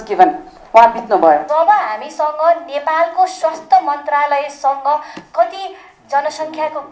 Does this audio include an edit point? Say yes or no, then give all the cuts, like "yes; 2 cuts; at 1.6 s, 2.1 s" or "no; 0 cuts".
yes; 1 cut; at 1.5 s